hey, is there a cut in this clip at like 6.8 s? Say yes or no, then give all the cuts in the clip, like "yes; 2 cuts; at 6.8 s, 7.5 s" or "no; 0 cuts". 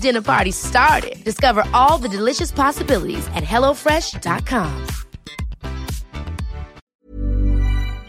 yes; 1 cut; at 6.8 s